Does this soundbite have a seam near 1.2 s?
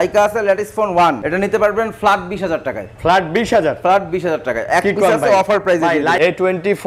yes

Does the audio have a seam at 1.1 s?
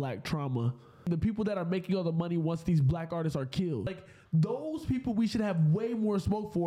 yes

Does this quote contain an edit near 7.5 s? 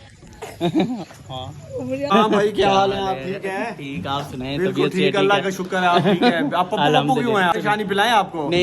yes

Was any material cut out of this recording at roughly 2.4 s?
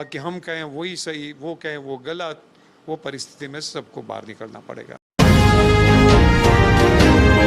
no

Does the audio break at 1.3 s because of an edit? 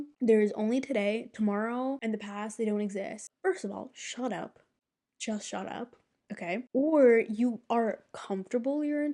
no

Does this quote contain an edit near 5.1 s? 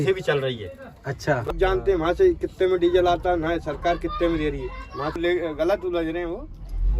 yes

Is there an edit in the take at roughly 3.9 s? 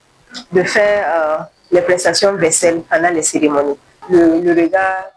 yes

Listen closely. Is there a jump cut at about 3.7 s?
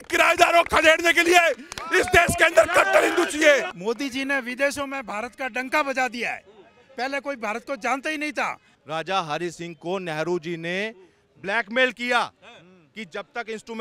yes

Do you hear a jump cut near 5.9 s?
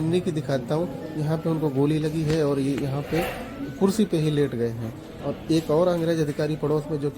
no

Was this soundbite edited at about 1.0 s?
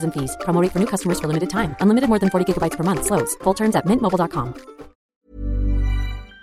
no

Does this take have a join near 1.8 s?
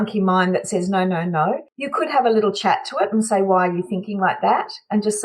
yes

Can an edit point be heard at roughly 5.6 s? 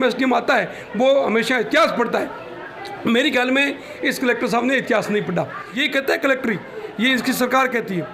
yes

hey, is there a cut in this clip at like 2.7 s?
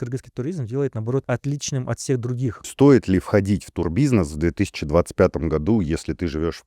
yes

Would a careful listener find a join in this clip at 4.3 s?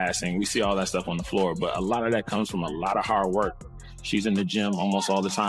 no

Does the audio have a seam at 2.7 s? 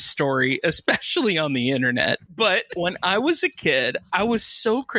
yes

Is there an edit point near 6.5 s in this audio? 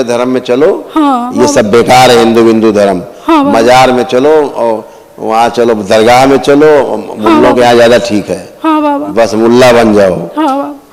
no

